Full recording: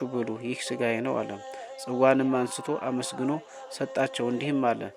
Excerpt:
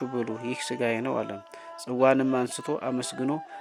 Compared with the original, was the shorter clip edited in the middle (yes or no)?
no